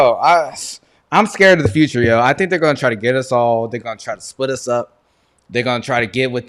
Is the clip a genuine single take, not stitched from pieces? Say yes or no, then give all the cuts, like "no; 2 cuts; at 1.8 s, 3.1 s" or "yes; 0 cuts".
yes; 0 cuts